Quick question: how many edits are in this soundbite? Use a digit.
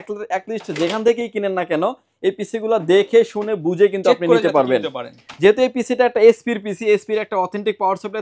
0